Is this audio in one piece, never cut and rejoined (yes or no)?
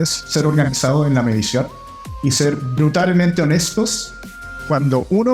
yes